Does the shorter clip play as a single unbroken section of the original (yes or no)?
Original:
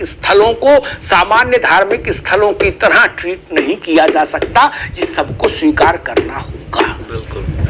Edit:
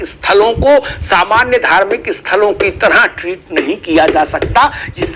yes